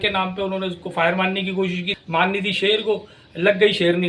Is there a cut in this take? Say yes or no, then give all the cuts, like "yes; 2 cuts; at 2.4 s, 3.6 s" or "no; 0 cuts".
yes; 1 cut; at 1.9 s